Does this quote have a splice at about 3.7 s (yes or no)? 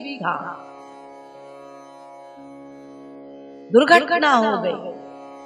yes